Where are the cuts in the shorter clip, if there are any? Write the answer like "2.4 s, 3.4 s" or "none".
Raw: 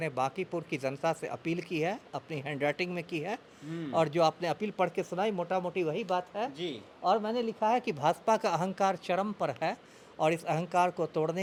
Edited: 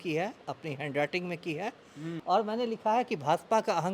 2.1 s